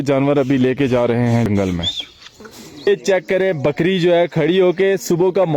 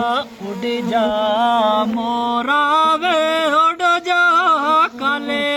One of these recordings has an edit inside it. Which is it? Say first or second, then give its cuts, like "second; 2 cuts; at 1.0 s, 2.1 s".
first; 2 cuts; at 1.5 s, 2.9 s